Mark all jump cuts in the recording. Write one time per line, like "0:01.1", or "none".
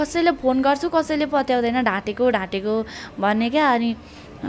none